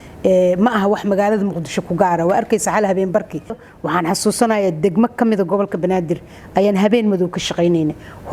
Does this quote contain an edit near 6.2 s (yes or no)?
no